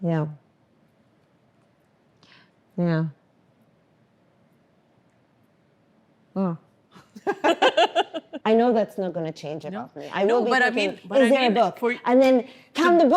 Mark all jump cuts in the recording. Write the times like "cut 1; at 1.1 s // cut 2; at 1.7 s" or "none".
cut 1; at 8.2 s